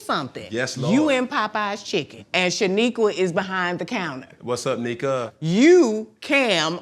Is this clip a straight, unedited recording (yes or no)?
no